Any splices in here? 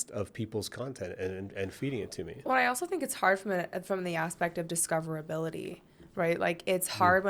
no; 0 cuts

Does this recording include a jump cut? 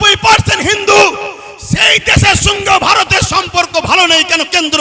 no; 0 cuts

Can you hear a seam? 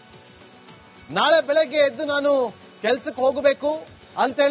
yes; 1 cut; at 1.0 s

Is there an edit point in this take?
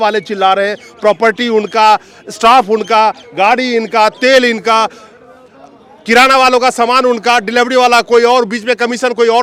no; 0 cuts

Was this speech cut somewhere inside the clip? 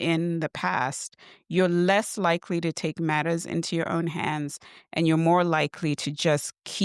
no; 0 cuts

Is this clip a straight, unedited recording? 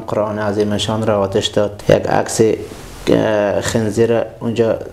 no; 1 cut; at 1.8 s

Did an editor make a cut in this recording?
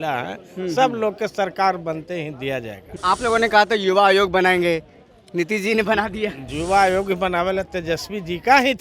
yes; 1 cut; at 2.8 s

